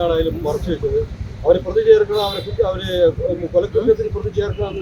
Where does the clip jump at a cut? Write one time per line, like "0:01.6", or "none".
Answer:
none